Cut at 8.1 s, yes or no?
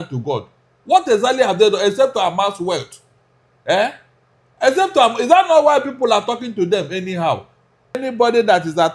yes